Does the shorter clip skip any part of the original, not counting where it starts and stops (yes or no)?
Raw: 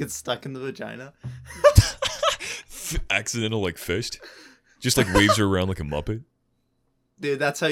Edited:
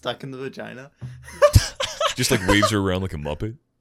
yes